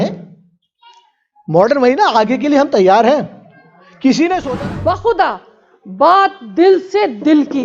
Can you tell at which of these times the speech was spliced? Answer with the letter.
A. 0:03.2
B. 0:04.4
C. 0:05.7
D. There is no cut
B